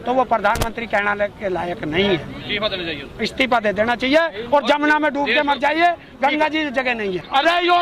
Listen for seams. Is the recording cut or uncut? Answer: uncut